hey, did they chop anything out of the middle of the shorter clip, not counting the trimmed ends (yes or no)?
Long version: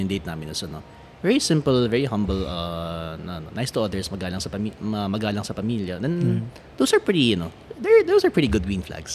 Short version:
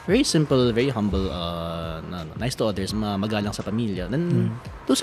yes